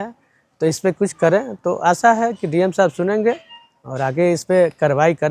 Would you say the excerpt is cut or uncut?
uncut